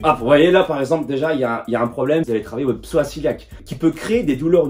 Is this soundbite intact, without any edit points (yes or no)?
no